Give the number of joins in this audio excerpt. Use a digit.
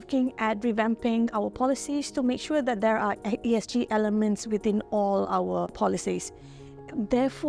1